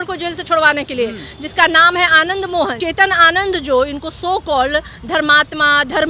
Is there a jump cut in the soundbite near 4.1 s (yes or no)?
no